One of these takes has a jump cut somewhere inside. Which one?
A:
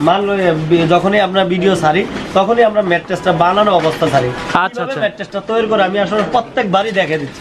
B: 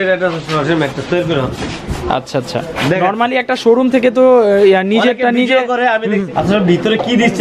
B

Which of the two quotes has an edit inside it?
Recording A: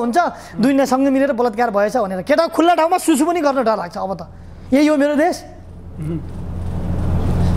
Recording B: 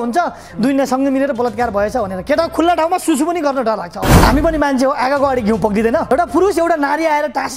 B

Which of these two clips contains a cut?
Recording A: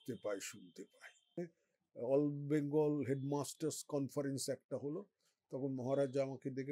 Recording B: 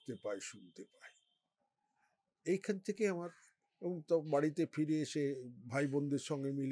A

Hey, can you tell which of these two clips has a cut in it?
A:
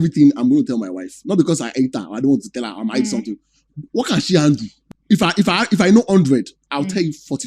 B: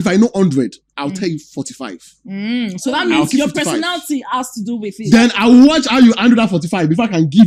A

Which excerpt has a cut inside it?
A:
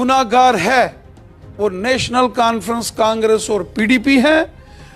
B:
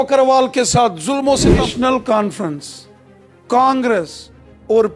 B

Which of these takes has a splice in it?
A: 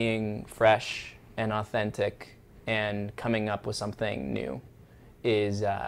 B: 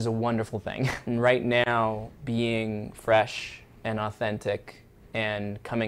B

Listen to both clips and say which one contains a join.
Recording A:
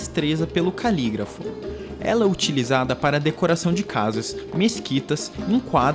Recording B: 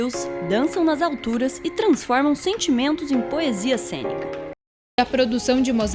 B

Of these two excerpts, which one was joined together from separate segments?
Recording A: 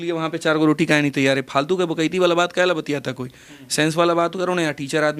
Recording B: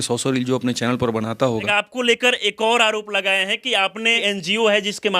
B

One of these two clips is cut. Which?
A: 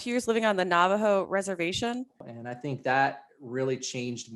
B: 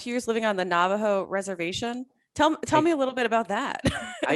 A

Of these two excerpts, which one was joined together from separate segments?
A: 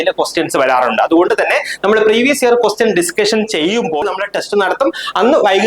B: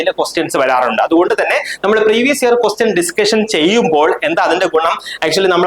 A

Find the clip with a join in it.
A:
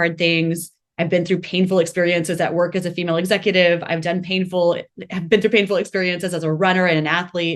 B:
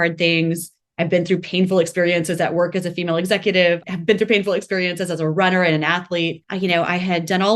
B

